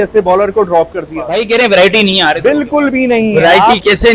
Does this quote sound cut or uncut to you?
cut